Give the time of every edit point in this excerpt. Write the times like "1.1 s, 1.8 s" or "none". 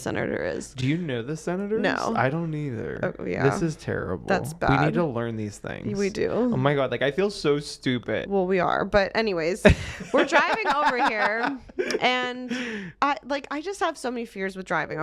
none